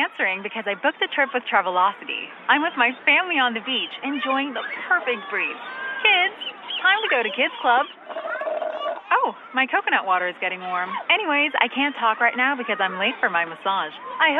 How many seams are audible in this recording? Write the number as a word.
zero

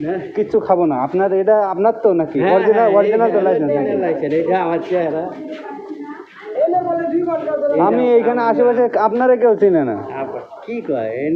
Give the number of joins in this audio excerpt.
zero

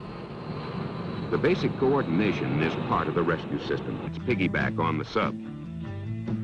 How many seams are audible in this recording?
zero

